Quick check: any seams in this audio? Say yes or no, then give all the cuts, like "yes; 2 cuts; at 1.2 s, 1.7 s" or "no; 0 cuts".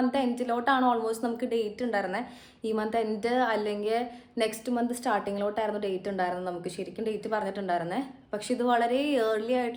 no; 0 cuts